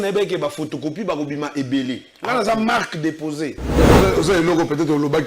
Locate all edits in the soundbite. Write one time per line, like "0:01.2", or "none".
0:03.8

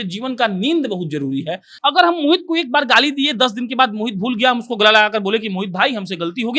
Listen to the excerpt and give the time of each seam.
0:01.6

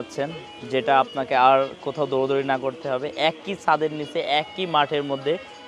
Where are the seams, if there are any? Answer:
none

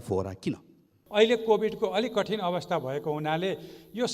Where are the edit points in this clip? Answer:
0:01.0

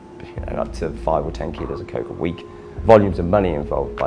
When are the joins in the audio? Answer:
none

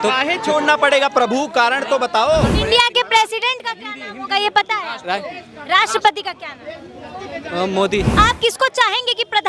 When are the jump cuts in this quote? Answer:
0:02.6
0:08.1

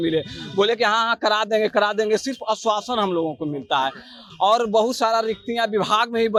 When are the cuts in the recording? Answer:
none

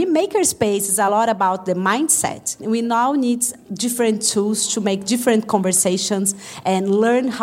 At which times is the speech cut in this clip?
0:01.1
0:02.5
0:06.4

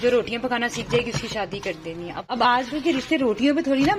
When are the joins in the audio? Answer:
0:02.3

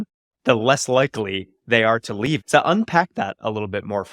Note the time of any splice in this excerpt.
0:02.4

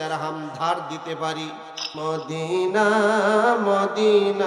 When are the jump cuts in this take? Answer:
0:02.0

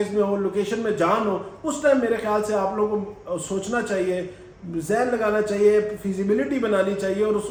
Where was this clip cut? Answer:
none

